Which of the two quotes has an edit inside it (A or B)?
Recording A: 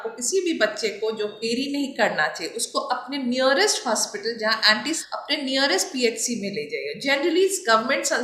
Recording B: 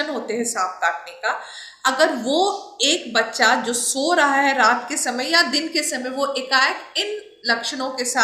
A